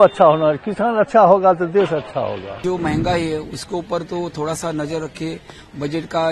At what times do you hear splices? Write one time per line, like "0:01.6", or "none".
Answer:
0:02.6